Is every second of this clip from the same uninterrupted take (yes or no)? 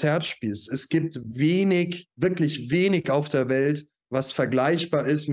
no